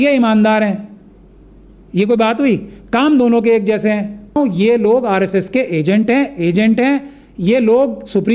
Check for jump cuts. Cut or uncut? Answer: cut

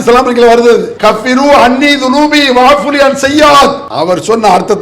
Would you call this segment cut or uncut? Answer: cut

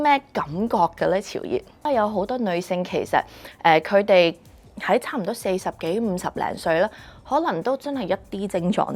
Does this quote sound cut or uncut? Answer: cut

